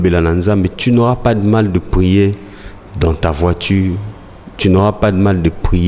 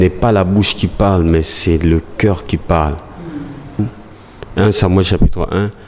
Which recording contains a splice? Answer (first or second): second